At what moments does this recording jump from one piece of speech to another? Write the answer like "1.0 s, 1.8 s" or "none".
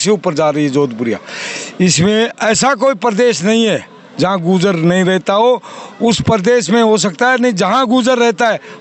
none